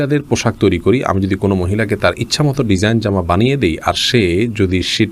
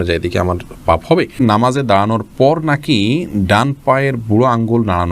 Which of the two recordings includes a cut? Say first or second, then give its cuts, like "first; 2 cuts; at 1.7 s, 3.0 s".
second; 1 cut; at 1.4 s